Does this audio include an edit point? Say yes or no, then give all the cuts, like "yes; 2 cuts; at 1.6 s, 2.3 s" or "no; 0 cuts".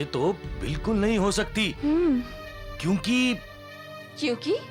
no; 0 cuts